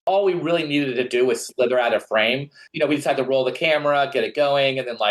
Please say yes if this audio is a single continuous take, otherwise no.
no